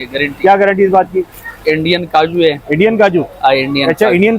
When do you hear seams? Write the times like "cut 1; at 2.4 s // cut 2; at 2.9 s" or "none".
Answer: cut 1; at 1.4 s